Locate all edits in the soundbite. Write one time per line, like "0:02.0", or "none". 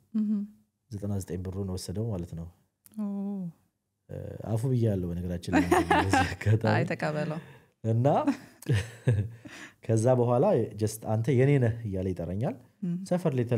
none